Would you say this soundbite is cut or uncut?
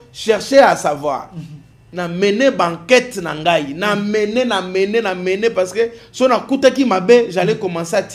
cut